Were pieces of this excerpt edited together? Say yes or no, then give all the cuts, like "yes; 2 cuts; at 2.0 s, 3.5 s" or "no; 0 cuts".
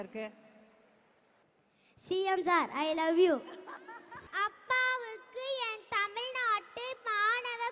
yes; 2 cuts; at 1.4 s, 4.2 s